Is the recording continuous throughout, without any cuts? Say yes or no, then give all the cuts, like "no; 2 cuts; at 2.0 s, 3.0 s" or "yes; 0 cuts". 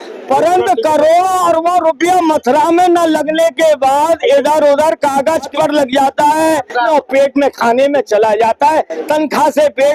no; 2 cuts; at 5.5 s, 6.9 s